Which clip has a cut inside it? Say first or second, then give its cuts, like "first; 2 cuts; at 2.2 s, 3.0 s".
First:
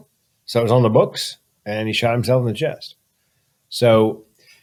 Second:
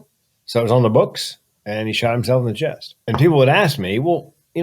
second; 1 cut; at 2.9 s